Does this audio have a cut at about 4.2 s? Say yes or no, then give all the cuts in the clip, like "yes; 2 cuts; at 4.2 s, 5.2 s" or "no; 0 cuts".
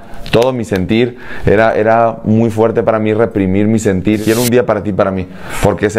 yes; 1 cut; at 4.2 s